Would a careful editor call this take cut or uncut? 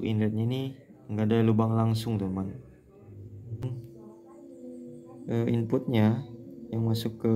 cut